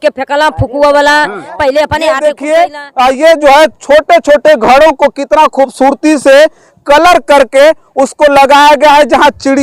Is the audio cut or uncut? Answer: cut